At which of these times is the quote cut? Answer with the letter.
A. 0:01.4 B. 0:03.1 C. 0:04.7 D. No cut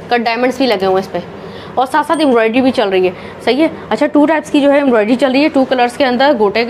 D